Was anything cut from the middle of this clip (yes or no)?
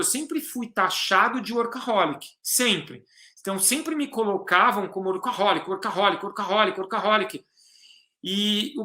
no